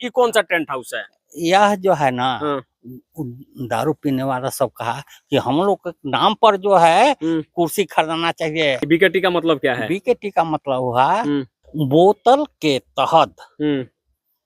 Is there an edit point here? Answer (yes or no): yes